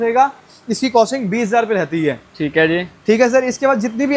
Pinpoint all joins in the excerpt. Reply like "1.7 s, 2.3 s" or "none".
none